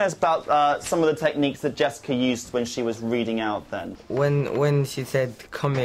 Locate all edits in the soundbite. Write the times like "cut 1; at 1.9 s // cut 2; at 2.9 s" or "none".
cut 1; at 4.0 s